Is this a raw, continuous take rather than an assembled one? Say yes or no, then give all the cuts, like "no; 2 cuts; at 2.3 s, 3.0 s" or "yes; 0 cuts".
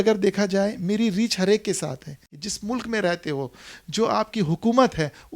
no; 1 cut; at 2.4 s